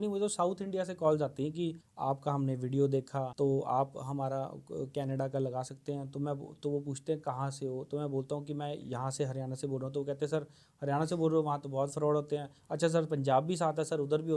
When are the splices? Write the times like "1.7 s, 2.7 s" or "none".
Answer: 1.9 s, 3.3 s